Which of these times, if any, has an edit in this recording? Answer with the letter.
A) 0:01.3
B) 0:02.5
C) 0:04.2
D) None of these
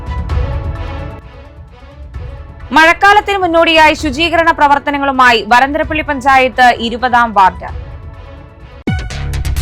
B